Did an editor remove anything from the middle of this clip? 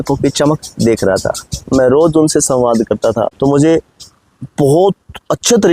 yes; 1 cut; at 3.3 s

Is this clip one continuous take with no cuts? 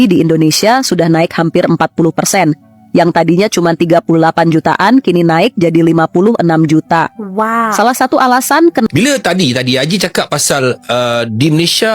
no; 1 cut; at 8.9 s

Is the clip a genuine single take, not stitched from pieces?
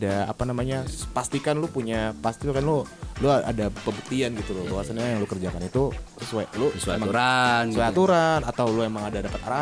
yes; 0 cuts

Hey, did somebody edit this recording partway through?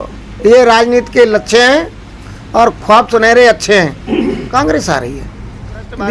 yes; 1 cut; at 4.4 s

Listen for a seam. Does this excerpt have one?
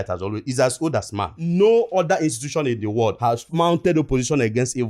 yes; 1 cut; at 1.4 s

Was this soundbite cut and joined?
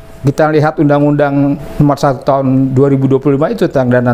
yes; 1 cut; at 1.7 s

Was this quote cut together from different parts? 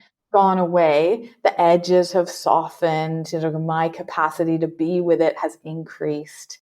no; 0 cuts

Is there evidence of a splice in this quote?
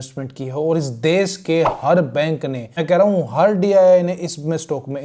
yes; 1 cut; at 2.7 s

